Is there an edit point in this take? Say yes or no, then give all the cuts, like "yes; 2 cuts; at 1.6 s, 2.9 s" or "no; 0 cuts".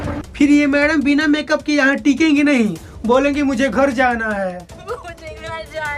no; 0 cuts